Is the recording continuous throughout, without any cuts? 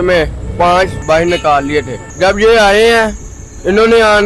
no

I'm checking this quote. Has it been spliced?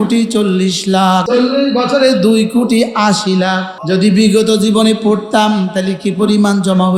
yes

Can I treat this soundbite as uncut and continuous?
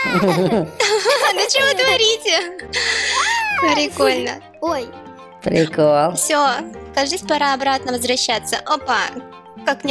yes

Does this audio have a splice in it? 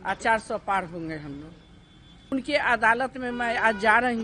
yes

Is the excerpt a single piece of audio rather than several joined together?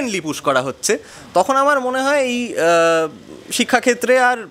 yes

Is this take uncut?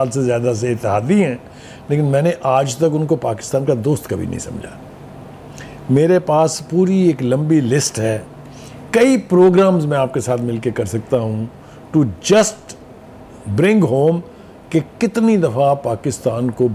yes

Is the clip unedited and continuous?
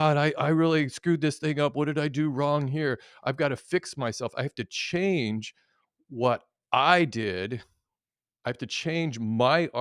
yes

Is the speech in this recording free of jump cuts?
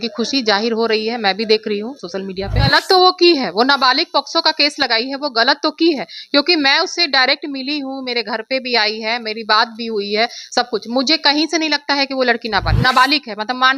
no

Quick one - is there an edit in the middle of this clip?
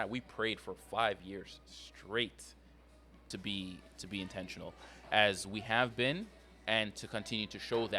yes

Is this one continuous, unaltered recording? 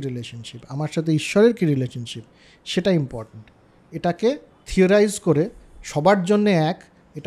yes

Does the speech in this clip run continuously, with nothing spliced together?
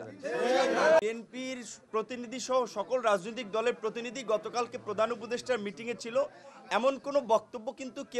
no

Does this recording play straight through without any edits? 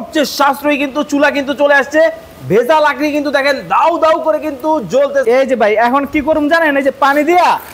no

